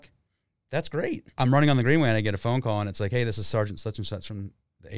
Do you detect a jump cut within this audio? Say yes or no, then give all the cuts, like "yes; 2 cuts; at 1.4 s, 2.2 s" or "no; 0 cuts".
yes; 1 cut; at 1.2 s